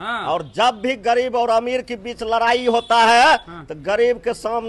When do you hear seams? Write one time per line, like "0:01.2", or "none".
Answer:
none